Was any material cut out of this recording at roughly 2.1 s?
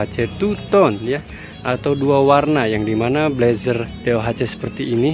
no; 1 cut; at 3.9 s

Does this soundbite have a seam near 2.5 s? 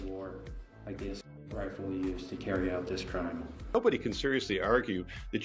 no; 1 cut; at 3.7 s

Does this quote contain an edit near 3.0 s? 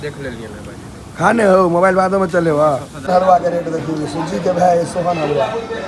yes; 1 cut; at 3.0 s

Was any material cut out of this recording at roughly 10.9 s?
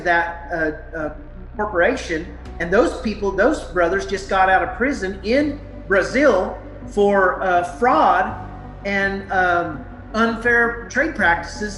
yes; 1 cut; at 10.9 s

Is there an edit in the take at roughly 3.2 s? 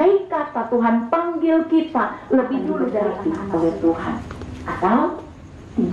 yes; 1 cut; at 3.2 s

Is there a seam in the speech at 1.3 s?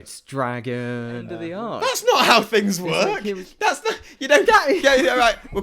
yes; 1 cut; at 1.3 s

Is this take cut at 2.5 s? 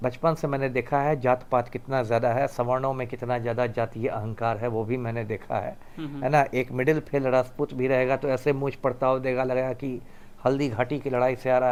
no; 0 cuts

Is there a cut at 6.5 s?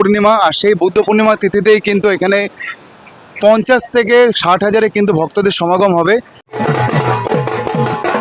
yes; 1 cut; at 6.5 s

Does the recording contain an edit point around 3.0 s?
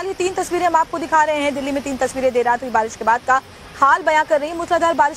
yes; 1 cut; at 3.0 s

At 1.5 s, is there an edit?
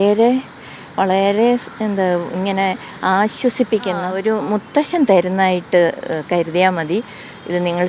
no; 1 cut; at 4.1 s

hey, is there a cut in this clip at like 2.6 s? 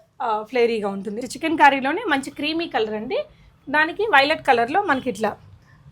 no; 1 cut; at 1.2 s

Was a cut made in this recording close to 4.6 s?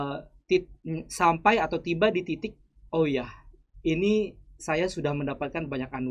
no; 0 cuts

